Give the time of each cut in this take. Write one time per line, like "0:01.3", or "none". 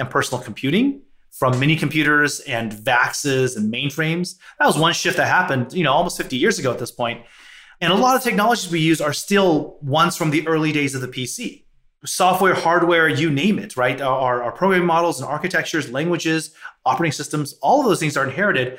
none